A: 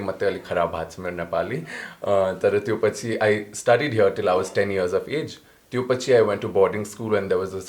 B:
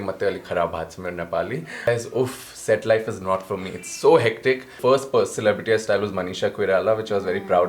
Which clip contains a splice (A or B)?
B